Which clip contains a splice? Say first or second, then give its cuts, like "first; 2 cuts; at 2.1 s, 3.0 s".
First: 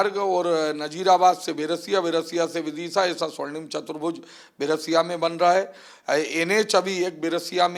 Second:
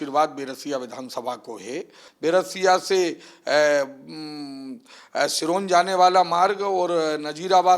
second; 1 cut; at 2.0 s